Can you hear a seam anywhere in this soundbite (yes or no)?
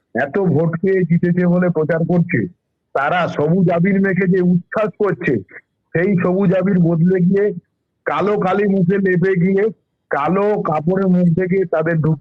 no